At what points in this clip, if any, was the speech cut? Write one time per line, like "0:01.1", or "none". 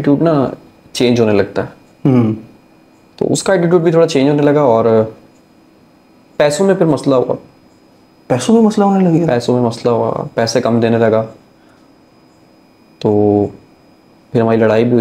none